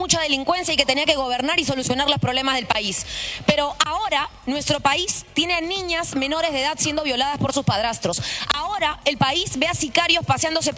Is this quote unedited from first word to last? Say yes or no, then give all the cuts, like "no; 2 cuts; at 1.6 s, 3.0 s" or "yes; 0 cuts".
yes; 0 cuts